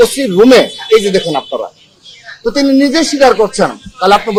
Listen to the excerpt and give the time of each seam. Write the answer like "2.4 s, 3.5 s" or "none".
none